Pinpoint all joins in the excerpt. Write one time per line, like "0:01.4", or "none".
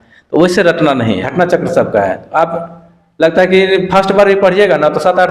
0:01.2